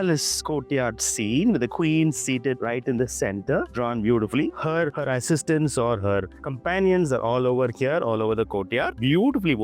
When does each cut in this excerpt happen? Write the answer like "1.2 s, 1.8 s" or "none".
none